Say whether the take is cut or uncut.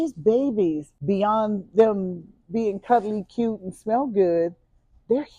cut